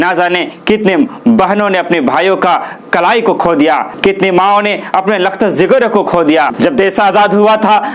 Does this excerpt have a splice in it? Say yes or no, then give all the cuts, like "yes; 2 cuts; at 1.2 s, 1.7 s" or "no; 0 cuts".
yes; 2 cuts; at 3.9 s, 6.5 s